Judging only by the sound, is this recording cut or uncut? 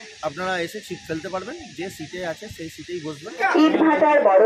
cut